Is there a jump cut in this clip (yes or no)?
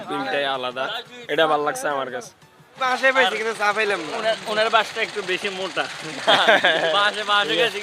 yes